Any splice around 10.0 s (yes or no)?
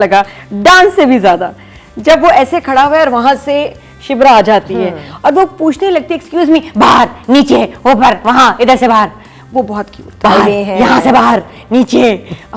yes